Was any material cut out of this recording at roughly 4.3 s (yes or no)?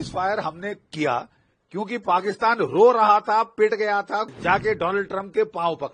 yes